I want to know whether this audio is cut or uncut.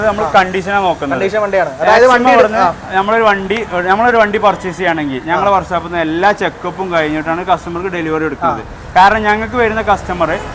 uncut